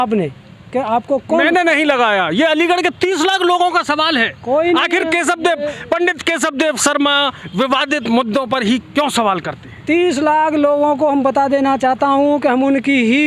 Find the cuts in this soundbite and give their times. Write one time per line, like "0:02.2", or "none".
none